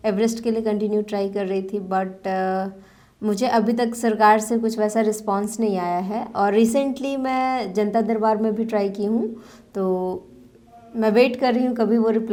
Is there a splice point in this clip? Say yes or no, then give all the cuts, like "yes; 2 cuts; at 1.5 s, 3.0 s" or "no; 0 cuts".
no; 0 cuts